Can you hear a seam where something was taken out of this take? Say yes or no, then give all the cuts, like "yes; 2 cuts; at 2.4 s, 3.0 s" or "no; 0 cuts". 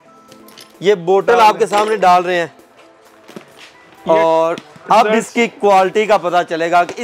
no; 0 cuts